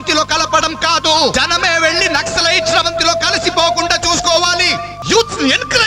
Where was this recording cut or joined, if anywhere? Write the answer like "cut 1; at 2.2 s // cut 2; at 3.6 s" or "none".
cut 1; at 1.3 s // cut 2; at 4.9 s